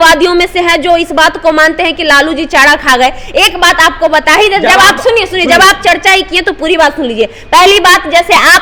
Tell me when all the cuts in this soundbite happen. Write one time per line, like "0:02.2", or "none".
none